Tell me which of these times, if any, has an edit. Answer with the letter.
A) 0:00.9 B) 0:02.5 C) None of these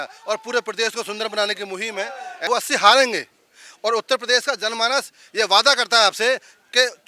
B